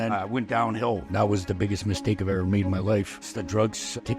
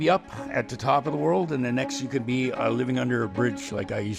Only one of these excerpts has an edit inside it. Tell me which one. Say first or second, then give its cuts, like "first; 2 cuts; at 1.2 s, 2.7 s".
first; 2 cuts; at 1.0 s, 3.2 s